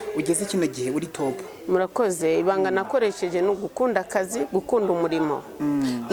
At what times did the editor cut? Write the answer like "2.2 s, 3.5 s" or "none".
none